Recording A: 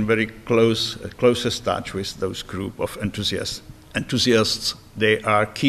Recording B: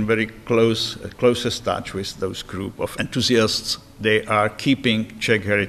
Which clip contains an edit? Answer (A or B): B